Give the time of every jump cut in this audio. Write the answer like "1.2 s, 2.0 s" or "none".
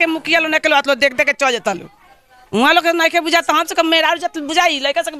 none